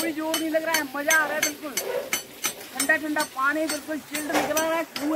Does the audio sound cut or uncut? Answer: uncut